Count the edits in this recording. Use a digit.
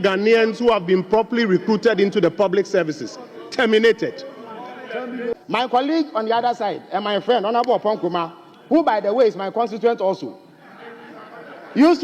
1